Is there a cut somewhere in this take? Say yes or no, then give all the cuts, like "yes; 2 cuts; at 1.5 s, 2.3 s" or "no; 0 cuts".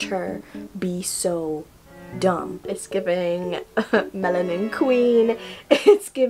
yes; 1 cut; at 2.6 s